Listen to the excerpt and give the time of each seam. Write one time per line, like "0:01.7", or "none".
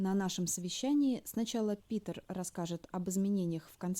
none